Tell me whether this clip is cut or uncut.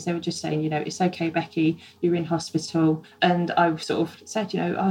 cut